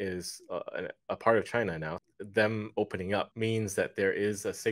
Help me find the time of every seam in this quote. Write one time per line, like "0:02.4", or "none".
0:01.9
0:03.3